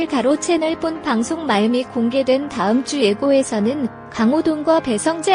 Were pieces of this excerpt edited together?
no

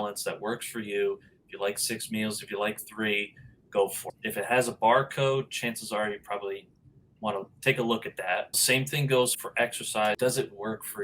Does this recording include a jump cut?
yes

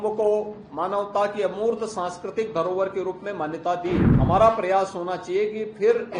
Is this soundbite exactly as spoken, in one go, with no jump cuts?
no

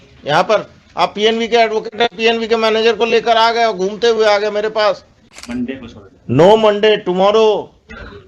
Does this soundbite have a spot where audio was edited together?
yes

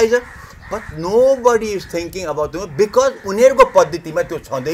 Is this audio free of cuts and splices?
yes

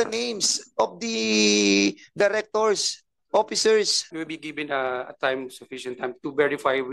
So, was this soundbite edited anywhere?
yes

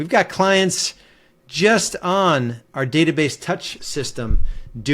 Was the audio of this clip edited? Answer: yes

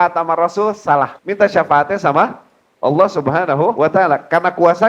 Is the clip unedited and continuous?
no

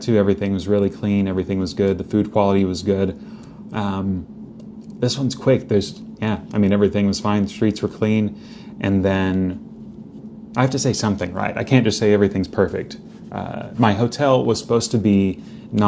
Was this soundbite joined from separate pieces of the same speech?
no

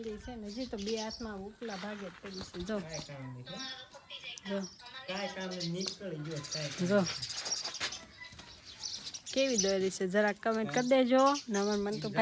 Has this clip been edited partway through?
no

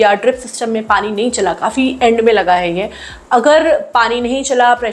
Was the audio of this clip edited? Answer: no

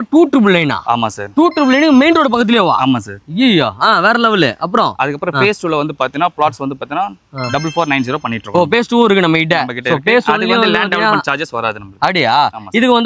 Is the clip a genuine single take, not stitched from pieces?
yes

